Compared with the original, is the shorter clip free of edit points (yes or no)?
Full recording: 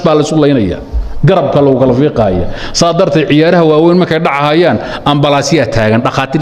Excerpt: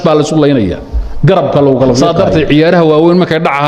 no